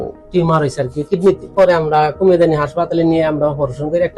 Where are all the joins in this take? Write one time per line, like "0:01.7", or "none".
0:01.5

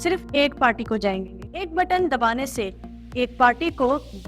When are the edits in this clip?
0:01.6

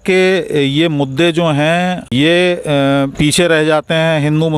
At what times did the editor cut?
0:02.1
0:03.1

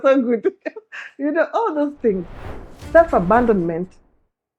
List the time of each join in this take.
0:02.5

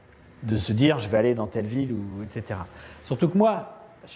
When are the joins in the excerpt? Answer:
0:01.5

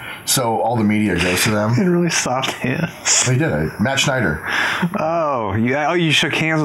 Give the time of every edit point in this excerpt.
none

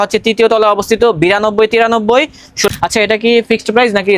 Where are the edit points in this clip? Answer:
0:02.7

